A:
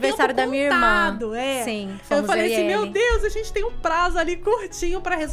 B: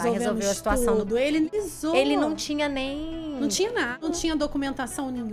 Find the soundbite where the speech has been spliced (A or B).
B